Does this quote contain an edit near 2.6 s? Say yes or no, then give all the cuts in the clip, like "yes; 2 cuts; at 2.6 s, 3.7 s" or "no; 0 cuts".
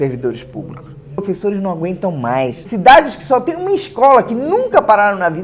yes; 2 cuts; at 1.2 s, 2.6 s